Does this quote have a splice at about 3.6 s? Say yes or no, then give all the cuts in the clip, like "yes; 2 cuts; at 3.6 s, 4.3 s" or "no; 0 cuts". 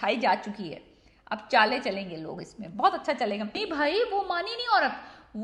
yes; 1 cut; at 3.6 s